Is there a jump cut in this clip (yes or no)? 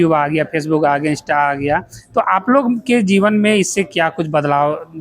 no